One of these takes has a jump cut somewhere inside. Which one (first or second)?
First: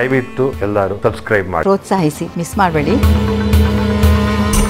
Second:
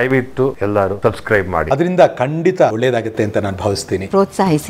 first